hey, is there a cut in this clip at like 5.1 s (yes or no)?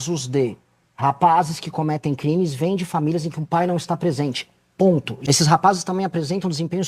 yes